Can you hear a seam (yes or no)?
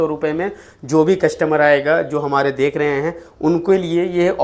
no